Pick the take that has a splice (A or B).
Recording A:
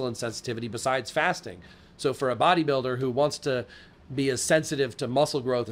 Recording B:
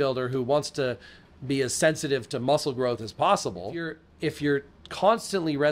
B